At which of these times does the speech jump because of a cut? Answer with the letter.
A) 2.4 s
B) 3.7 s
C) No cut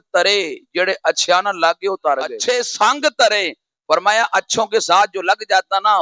A